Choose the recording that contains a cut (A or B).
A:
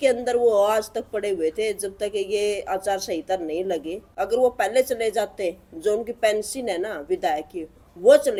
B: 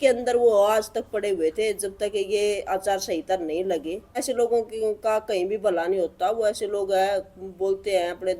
B